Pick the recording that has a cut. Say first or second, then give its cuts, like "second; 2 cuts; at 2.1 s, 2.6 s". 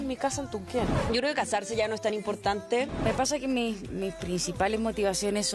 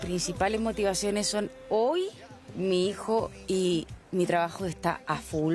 first; 2 cuts; at 1.0 s, 2.9 s